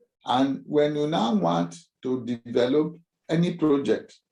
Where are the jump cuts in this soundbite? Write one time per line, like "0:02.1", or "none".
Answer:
none